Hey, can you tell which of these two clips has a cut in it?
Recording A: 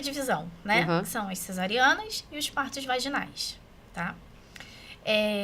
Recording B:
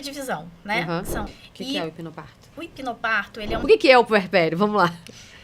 B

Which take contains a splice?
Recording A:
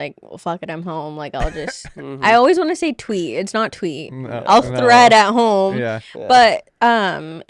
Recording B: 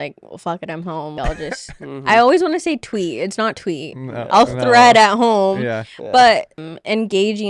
B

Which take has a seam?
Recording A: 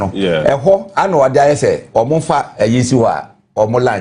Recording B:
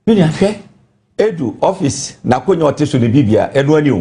A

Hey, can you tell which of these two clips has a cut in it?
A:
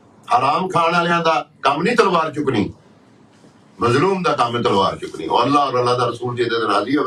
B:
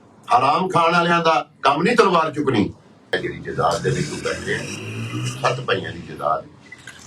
B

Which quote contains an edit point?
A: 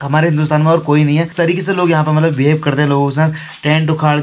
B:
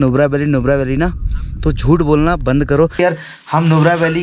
B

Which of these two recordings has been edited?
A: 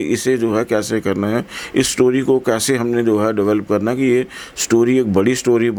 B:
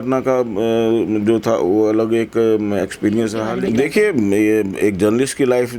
B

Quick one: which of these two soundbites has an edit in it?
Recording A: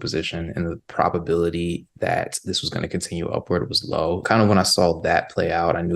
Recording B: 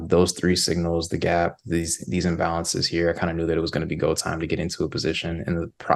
A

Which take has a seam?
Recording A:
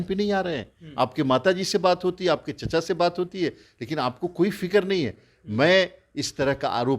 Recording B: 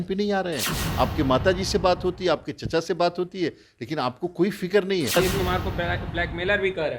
B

